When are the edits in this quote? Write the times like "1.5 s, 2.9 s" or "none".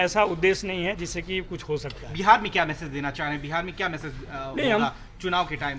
none